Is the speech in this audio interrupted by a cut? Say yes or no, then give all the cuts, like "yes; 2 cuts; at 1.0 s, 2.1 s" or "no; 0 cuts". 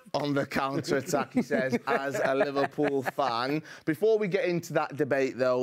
no; 0 cuts